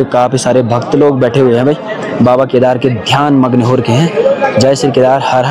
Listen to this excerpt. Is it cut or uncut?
uncut